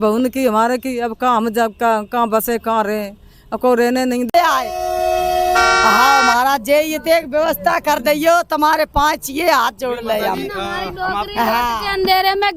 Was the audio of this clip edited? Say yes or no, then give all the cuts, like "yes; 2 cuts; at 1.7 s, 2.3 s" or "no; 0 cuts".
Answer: yes; 1 cut; at 4.3 s